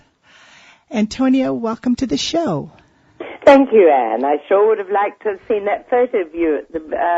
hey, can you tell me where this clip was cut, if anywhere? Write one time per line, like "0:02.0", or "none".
0:03.8